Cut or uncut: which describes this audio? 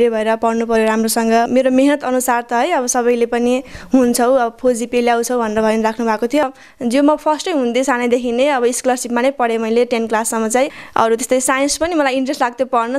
cut